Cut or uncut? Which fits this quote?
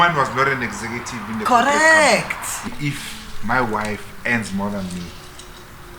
cut